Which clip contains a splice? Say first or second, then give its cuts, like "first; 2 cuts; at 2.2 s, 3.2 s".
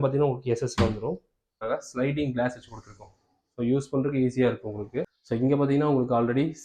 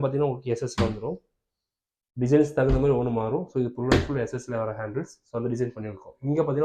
first; 2 cuts; at 1.5 s, 5.2 s